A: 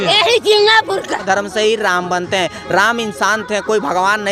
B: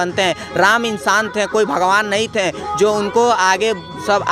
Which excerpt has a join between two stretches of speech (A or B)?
A